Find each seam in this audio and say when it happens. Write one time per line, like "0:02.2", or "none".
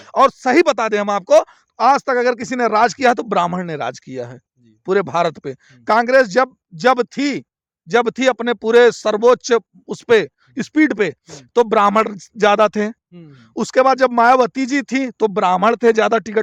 none